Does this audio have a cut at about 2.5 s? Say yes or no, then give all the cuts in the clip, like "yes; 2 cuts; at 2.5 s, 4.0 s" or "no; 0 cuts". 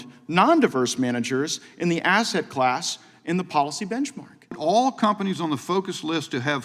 no; 1 cut; at 4.6 s